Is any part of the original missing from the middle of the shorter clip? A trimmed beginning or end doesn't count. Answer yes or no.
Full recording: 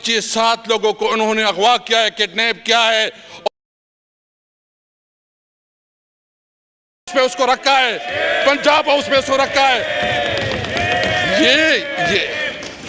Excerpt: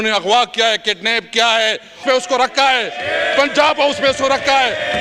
yes